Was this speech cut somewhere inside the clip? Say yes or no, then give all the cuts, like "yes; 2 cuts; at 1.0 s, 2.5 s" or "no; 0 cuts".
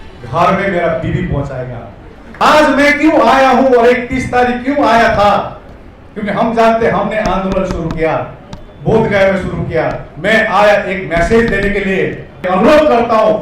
yes; 2 cuts; at 2.4 s, 12.4 s